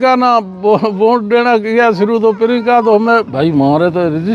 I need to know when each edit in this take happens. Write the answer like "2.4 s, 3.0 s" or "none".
3.3 s